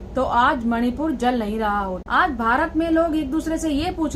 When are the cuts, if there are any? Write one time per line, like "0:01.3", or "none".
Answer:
0:02.0